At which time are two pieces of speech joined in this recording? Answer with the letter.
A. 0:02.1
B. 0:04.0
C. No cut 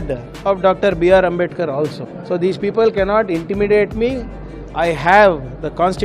A